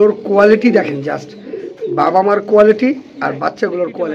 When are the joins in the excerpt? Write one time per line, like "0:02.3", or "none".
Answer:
none